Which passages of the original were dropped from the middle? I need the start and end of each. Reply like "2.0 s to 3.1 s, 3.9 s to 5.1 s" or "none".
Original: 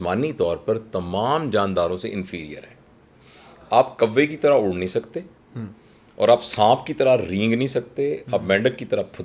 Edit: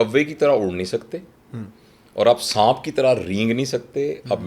none